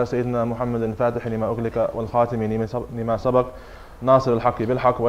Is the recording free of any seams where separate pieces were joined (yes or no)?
no